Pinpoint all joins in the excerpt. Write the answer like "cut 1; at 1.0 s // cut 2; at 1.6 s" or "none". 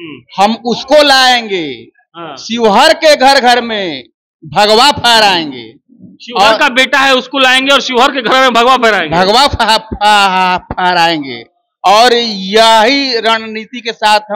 none